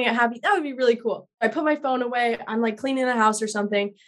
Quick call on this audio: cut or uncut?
cut